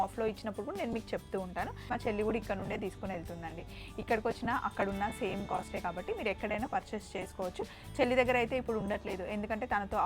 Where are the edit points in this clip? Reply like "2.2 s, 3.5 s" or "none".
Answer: 1.9 s